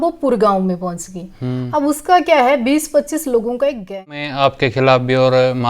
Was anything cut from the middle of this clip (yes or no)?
yes